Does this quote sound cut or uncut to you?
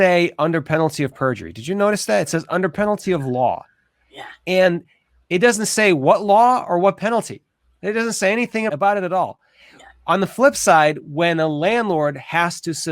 cut